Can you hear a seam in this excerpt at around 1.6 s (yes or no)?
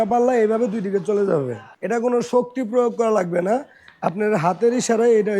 yes